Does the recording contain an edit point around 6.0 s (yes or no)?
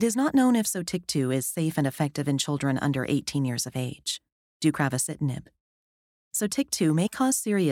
no